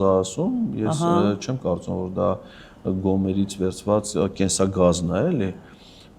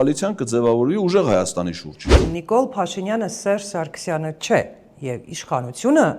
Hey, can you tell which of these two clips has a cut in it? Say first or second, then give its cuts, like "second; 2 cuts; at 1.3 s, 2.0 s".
second; 1 cut; at 2.2 s